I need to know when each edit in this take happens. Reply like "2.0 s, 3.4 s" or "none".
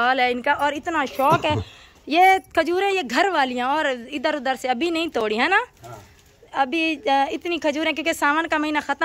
none